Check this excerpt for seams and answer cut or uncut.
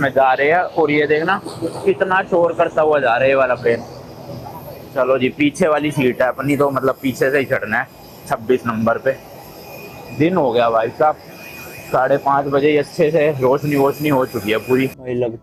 uncut